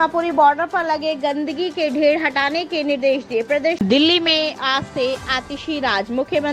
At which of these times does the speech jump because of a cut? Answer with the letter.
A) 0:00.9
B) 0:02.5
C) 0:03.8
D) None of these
C